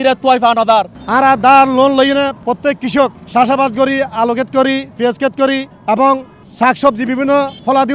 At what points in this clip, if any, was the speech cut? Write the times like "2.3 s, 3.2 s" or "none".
1.0 s, 2.4 s, 3.2 s

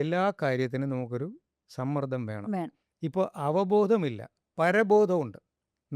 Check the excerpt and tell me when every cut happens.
2.8 s

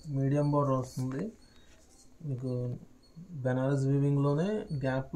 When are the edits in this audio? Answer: none

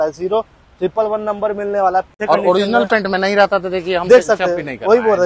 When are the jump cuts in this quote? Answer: 2.1 s

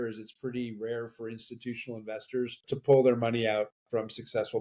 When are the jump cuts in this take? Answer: 2.7 s

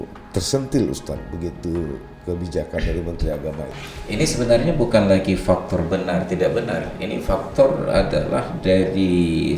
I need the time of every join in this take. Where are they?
3.8 s

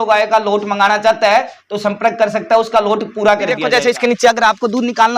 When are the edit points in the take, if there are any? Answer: 3.6 s

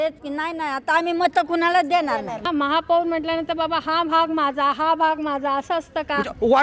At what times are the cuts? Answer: 2.4 s

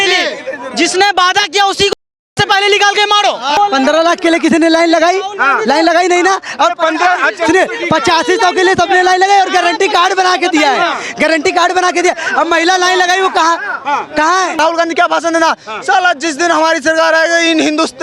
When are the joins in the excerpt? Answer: 3.6 s, 14.6 s

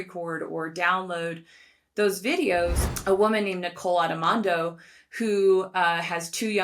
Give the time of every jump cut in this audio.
2.8 s

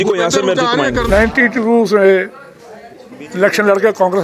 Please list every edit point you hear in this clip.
1.1 s

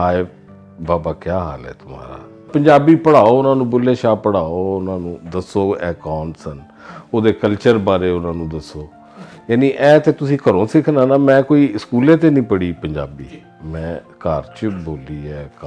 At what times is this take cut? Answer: 2.5 s, 5.2 s

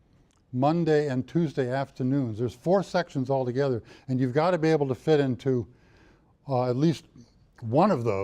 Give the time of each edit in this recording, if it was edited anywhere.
2.6 s

